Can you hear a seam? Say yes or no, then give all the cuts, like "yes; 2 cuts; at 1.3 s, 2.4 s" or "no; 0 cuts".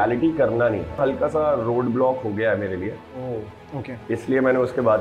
yes; 2 cuts; at 1.0 s, 3.5 s